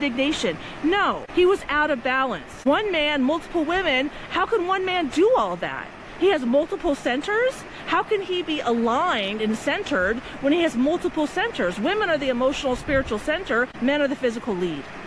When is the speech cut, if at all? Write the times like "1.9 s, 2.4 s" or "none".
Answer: 1.2 s, 2.5 s, 13.7 s